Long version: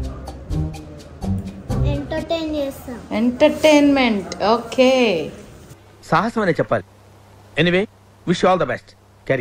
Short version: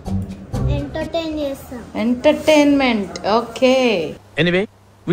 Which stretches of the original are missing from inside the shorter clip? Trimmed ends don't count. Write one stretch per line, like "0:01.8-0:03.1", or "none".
0:05.4-0:07.4